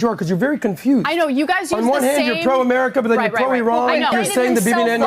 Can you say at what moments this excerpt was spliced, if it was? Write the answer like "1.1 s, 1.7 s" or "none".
4.1 s